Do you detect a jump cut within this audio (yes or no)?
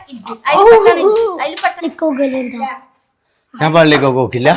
yes